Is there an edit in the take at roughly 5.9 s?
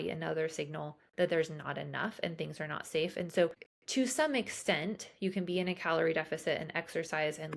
no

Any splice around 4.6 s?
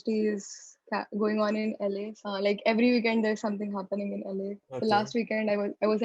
yes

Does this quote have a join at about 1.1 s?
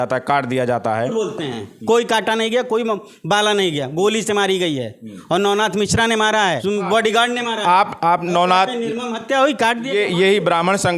yes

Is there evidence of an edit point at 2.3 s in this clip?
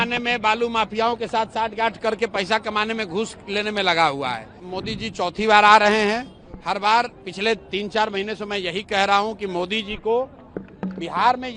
no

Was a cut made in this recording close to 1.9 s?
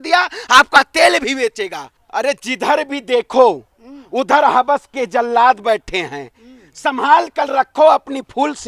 yes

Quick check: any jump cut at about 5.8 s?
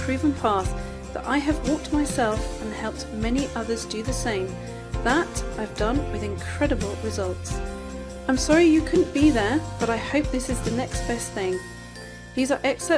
yes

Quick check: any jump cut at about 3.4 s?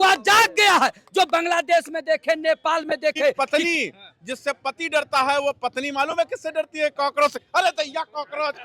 yes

